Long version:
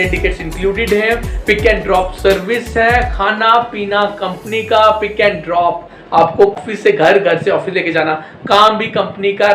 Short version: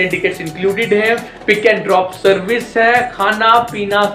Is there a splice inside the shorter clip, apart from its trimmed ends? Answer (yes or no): no